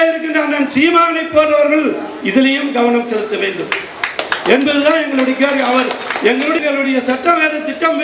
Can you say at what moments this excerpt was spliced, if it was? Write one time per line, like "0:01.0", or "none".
0:06.6

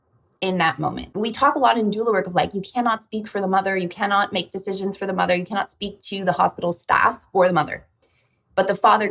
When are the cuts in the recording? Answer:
0:01.0

